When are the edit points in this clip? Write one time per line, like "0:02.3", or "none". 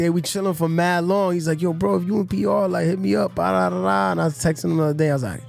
none